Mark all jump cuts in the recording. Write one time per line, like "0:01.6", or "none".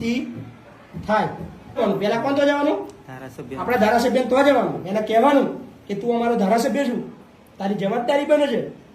0:01.8